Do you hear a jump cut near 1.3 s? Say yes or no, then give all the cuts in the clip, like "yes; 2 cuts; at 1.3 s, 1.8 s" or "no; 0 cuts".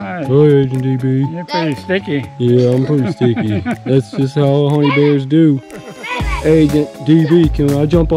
no; 0 cuts